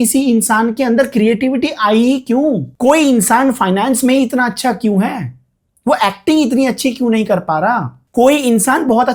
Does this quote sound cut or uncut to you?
uncut